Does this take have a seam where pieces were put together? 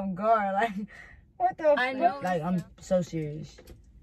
yes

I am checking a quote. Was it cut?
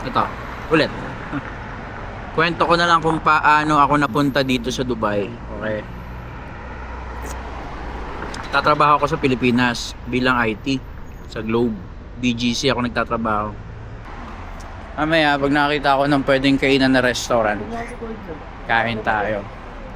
yes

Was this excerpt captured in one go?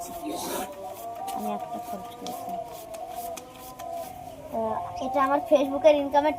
no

